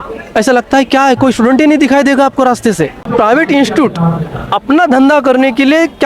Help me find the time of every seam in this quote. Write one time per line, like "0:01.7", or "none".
0:03.1